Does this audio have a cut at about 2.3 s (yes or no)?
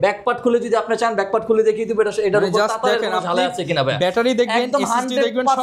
no